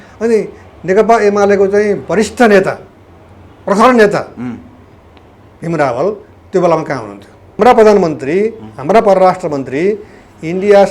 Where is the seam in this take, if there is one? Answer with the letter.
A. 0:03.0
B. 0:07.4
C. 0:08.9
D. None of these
B